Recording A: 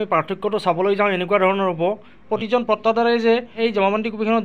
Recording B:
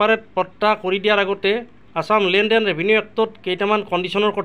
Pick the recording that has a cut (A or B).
A